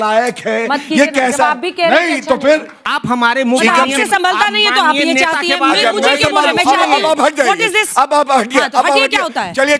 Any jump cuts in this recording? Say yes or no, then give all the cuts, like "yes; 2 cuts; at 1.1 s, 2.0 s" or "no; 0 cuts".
yes; 1 cut; at 2.9 s